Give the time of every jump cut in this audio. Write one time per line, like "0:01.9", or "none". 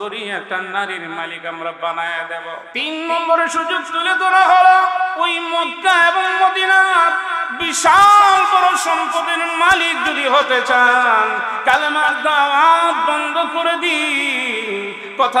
0:02.7
0:05.1